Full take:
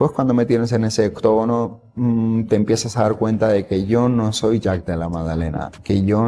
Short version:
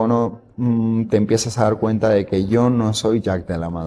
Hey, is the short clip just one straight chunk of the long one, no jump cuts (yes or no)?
yes